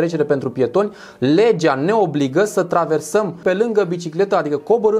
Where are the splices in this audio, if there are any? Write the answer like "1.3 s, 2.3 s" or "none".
3.4 s